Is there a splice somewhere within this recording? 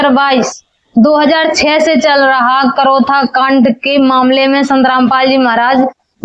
no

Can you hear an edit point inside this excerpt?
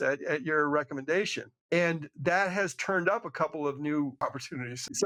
no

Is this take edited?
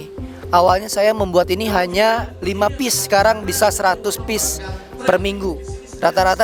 no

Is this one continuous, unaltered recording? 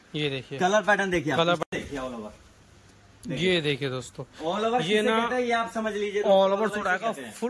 no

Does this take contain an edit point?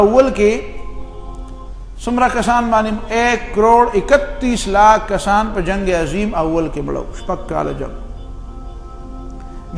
no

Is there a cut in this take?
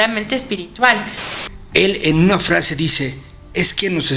yes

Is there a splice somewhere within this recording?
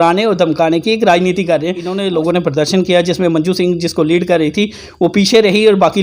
yes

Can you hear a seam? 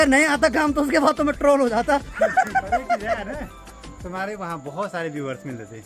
no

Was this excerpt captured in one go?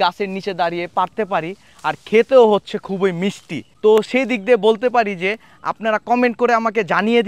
yes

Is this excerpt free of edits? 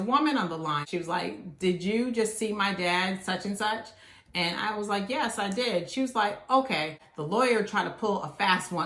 no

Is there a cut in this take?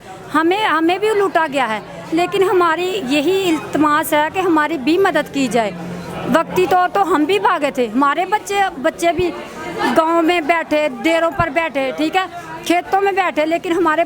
no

